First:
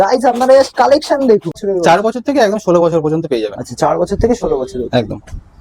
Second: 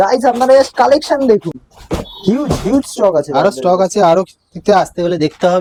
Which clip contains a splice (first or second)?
first